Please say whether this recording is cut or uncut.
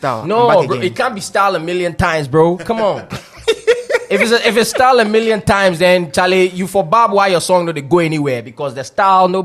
uncut